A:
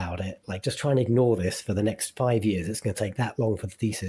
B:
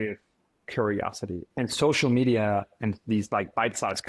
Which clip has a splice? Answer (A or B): B